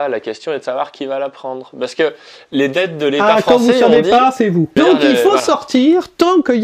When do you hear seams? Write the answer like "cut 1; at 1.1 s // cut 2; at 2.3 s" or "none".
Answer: cut 1; at 4.7 s